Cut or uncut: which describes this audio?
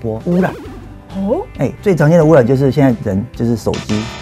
uncut